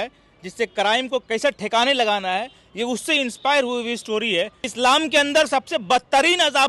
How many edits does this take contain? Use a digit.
1